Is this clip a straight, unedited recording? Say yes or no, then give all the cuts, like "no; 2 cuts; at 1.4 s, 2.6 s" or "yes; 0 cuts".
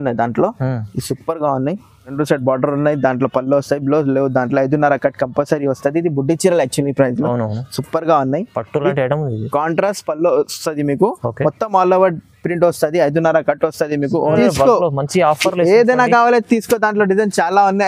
no; 2 cuts; at 2.1 s, 14.3 s